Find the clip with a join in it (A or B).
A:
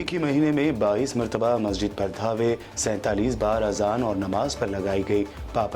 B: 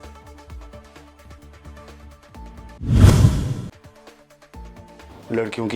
B